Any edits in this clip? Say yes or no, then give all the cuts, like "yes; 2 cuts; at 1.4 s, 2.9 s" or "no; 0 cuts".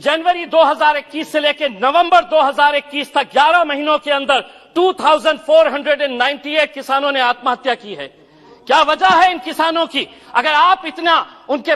no; 0 cuts